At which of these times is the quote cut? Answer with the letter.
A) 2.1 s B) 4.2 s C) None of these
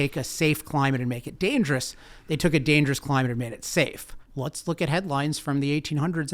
B